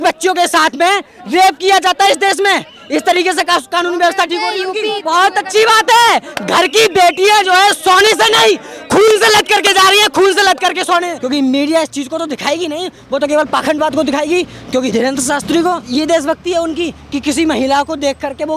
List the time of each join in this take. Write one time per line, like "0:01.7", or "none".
0:05.0
0:11.2
0:15.8